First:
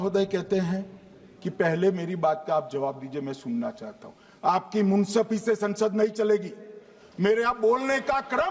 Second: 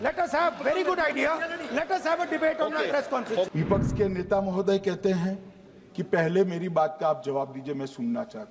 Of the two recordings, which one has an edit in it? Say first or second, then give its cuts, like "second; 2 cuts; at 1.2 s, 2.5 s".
second; 1 cut; at 3.5 s